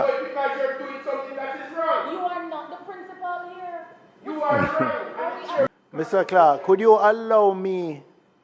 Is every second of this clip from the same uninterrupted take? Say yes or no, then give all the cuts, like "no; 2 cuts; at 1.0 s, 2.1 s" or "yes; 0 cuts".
no; 1 cut; at 5.7 s